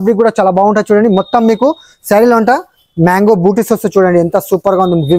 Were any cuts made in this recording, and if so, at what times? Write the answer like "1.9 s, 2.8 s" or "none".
none